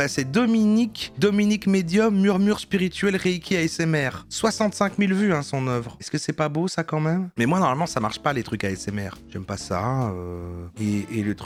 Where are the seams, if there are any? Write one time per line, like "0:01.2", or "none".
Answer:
none